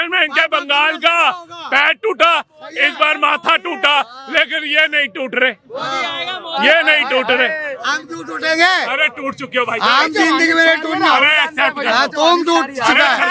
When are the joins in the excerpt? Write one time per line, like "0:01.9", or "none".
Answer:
none